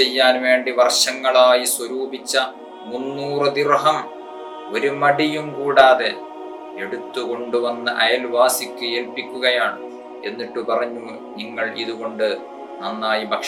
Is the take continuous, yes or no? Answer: yes